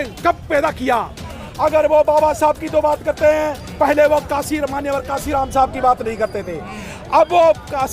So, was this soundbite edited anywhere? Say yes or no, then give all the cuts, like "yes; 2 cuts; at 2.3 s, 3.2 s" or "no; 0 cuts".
yes; 1 cut; at 1.2 s